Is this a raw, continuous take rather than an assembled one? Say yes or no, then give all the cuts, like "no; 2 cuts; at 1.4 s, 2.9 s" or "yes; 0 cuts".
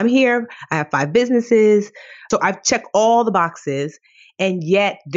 no; 1 cut; at 2.3 s